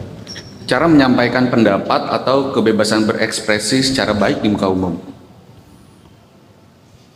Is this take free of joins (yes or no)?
yes